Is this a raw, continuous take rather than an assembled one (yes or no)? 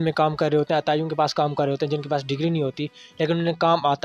yes